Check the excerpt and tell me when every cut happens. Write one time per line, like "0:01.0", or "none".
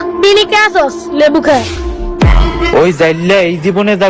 0:02.7